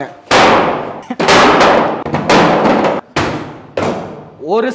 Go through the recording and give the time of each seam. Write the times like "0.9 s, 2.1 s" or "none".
1.0 s, 2.0 s, 3.0 s